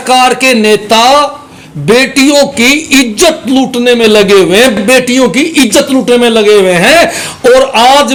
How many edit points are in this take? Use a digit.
0